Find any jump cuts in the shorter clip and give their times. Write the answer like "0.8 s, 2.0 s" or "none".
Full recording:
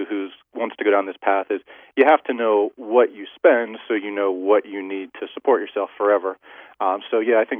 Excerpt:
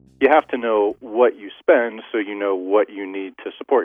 none